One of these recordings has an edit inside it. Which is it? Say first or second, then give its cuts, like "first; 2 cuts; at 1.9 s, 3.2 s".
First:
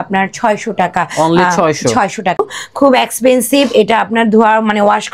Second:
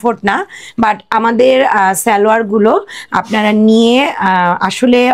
first; 1 cut; at 2.4 s